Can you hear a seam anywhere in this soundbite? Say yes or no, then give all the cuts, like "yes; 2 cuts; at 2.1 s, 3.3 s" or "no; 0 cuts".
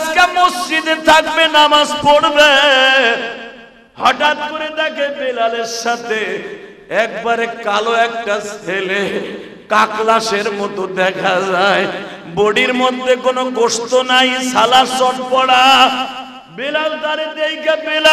no; 0 cuts